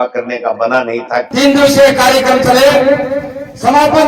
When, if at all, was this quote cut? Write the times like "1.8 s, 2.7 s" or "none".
1.3 s